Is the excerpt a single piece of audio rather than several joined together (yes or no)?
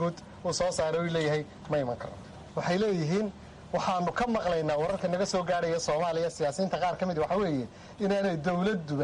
no